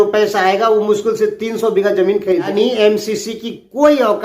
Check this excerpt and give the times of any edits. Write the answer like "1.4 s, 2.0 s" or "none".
2.5 s